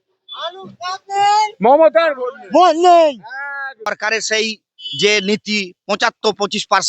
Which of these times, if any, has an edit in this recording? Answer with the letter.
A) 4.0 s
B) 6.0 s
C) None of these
A